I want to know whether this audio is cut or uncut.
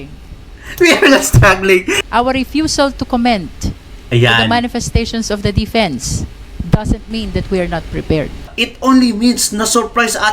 cut